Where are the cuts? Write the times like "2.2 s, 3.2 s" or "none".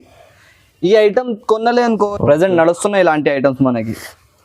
2.0 s